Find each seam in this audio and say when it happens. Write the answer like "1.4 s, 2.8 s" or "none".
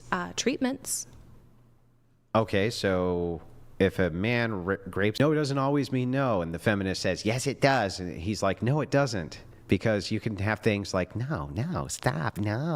5.2 s